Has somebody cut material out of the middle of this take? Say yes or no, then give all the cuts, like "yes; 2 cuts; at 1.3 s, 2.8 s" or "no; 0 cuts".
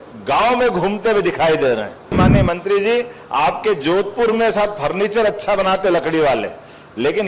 yes; 1 cut; at 2.2 s